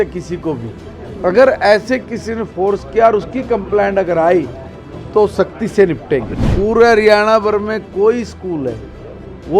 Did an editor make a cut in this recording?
yes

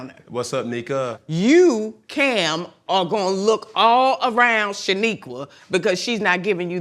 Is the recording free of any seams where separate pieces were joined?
no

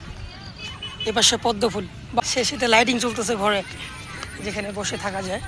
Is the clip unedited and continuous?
no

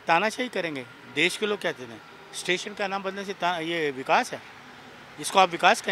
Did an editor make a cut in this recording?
no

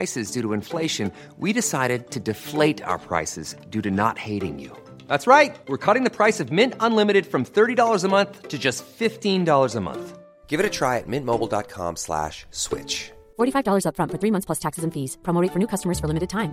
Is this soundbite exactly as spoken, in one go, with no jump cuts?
yes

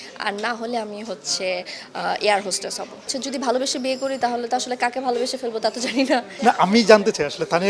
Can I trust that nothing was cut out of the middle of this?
no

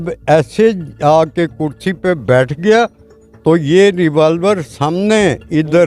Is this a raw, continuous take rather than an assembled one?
yes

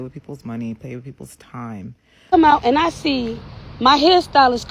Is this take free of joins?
no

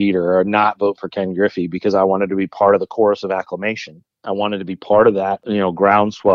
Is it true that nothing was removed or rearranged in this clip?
no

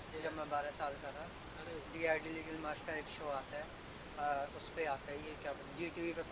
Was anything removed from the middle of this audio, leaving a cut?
no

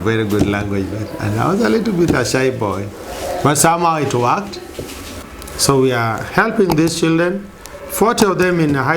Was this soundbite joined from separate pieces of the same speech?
yes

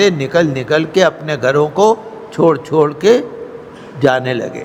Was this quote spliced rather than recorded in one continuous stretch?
no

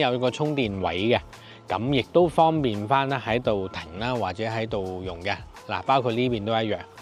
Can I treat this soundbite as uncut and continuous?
yes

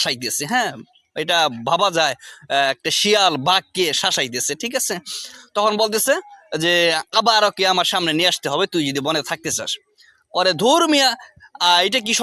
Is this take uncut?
yes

